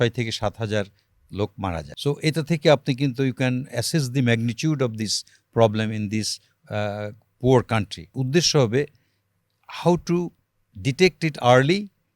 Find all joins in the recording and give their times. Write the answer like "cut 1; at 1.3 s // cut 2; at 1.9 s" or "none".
cut 1; at 1.9 s // cut 2; at 8.2 s